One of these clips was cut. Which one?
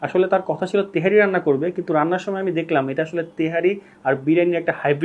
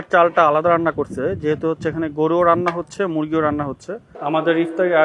second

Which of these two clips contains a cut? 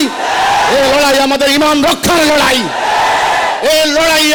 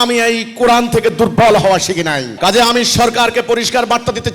second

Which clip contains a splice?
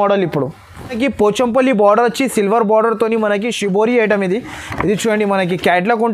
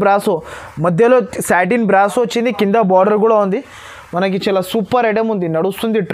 first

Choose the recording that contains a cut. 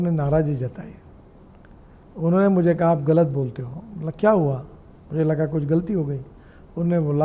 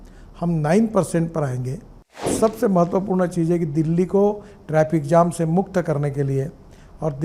second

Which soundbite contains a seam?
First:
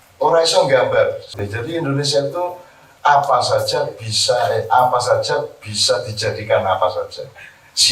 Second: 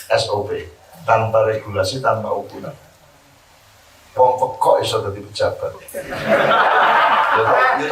first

